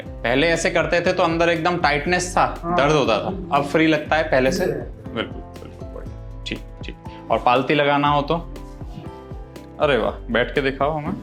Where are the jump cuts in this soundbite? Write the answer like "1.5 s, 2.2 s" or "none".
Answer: none